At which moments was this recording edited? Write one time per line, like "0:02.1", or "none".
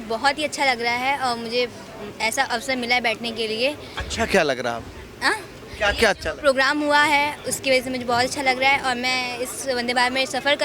none